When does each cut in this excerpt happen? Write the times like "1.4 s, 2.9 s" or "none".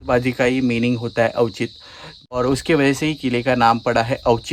none